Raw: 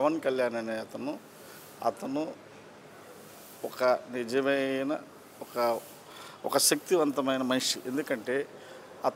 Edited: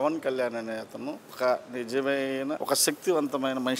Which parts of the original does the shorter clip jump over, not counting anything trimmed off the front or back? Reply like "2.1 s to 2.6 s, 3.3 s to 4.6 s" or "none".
1.3 s to 3.7 s, 5.0 s to 6.4 s